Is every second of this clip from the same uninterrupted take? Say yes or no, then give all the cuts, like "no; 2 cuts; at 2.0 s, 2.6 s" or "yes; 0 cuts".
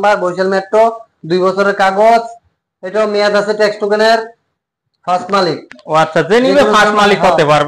yes; 0 cuts